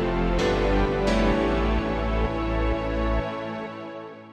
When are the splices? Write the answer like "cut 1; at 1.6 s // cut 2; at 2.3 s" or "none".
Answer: none